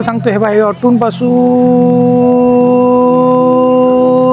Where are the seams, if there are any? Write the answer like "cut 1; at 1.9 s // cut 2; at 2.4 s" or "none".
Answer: none